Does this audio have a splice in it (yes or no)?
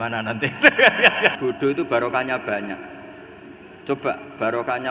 yes